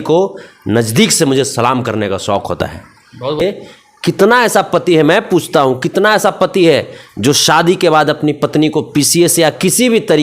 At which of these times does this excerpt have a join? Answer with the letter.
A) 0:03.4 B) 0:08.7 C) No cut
A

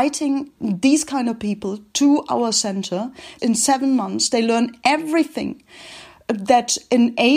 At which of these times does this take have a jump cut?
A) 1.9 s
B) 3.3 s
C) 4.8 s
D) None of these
B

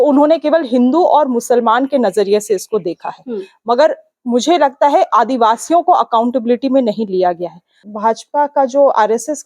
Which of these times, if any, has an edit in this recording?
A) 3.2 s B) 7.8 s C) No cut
B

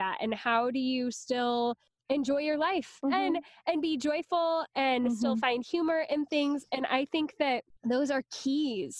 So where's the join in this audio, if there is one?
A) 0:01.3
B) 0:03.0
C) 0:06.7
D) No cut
B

